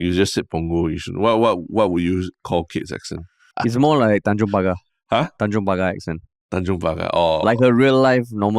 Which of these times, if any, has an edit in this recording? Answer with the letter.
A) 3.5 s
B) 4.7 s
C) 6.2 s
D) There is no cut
A